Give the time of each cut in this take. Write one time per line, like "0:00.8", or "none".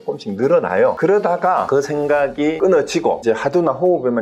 0:01.0
0:01.7
0:02.6
0:03.2